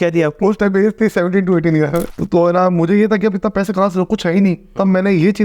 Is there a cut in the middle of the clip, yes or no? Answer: yes